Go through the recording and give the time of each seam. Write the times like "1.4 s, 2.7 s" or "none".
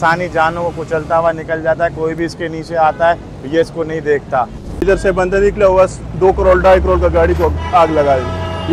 4.8 s